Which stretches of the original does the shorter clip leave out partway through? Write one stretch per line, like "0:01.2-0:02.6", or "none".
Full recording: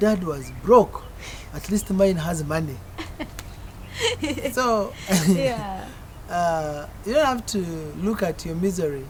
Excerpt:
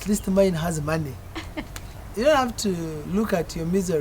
0:03.6-0:06.9